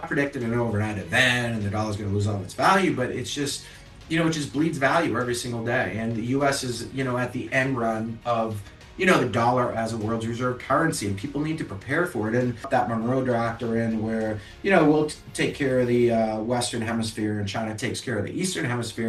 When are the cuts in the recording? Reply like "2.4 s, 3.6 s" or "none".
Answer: none